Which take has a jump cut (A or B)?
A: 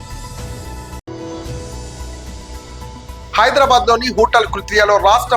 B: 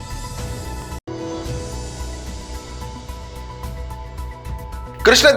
B